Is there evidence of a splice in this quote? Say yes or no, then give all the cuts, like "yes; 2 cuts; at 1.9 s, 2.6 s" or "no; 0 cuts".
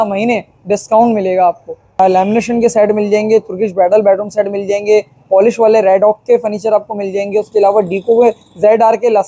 yes; 1 cut; at 2.0 s